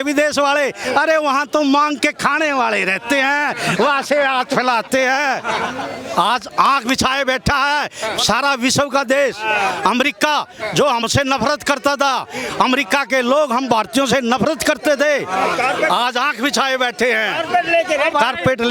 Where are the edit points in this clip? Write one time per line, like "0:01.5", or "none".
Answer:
none